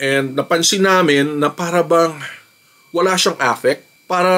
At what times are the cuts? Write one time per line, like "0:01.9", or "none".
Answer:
none